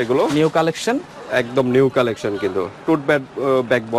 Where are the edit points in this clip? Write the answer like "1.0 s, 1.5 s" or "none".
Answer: none